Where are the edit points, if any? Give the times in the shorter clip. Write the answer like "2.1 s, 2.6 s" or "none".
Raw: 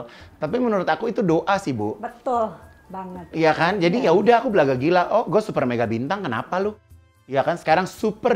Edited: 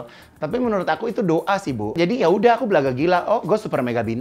1.9 s